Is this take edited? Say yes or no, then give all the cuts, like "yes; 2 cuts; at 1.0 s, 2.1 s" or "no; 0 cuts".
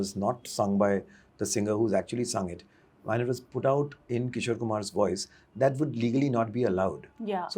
no; 0 cuts